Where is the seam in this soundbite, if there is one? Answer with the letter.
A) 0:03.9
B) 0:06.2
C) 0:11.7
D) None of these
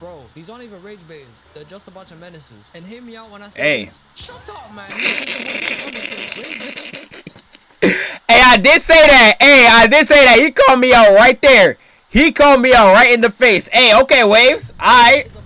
D